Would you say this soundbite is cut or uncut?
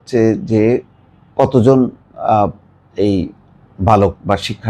uncut